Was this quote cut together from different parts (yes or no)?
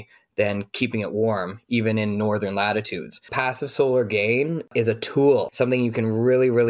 yes